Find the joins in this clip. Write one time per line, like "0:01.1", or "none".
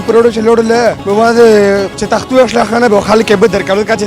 0:01.0
0:02.0

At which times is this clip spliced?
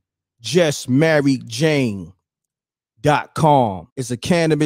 0:02.0

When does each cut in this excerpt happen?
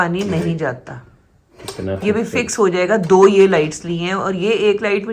none

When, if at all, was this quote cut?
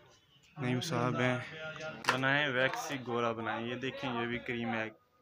0:01.9

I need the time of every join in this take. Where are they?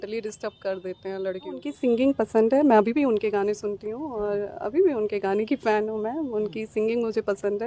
0:01.7

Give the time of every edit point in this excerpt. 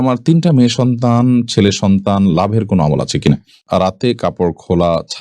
0:03.6

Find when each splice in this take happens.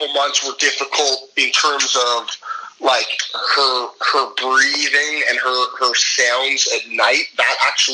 none

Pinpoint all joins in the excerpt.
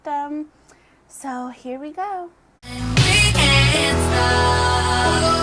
0:04.3

